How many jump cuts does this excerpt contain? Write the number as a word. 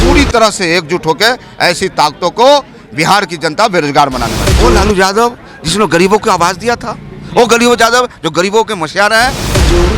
one